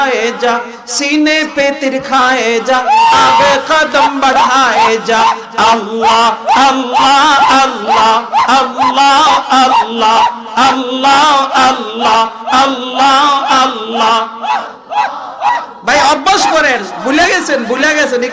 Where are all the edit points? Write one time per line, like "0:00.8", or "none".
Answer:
none